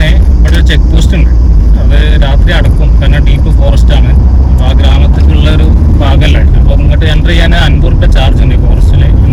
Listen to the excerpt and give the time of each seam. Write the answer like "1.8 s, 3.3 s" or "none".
none